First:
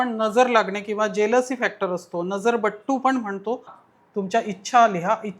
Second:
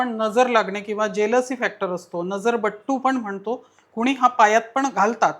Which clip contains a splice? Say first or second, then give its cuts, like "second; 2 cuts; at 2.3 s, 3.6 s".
first; 1 cut; at 3.8 s